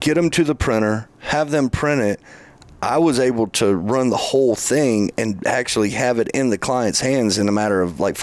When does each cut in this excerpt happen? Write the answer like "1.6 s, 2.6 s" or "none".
none